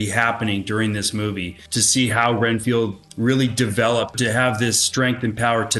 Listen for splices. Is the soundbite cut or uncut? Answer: cut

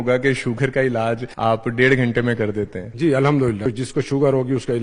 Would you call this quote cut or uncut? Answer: cut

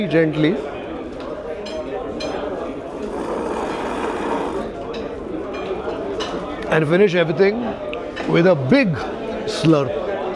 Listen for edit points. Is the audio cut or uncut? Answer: uncut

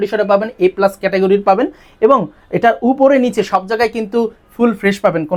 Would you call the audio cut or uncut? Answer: uncut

